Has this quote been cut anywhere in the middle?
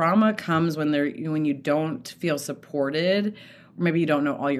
no; 0 cuts

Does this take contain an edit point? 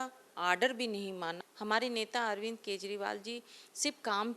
yes; 1 cut; at 1.4 s

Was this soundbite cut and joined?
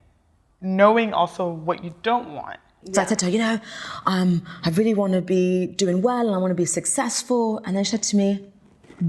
yes; 1 cut; at 2.8 s

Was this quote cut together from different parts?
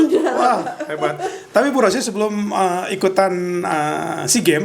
no; 0 cuts

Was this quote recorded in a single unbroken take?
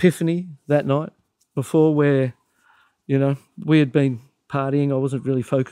yes; 0 cuts

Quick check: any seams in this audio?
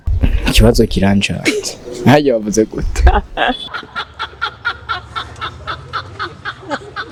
no; 0 cuts

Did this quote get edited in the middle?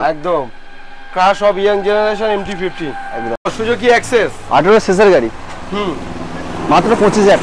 yes; 1 cut; at 3.5 s

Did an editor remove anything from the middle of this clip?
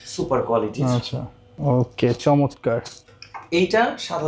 no; 0 cuts

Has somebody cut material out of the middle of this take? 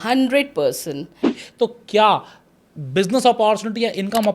yes; 1 cut; at 1.4 s

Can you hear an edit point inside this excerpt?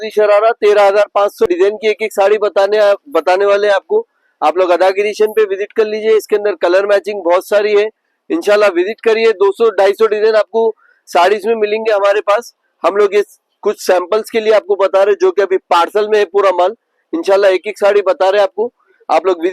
yes; 1 cut; at 1.5 s

